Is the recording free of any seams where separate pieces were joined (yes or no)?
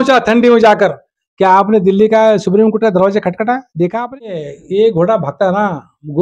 no